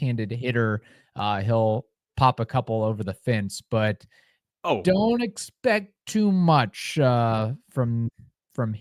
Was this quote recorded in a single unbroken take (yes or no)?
yes